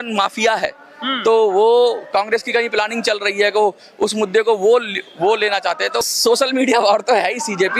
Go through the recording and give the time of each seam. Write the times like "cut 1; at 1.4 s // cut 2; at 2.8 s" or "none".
cut 1; at 6.1 s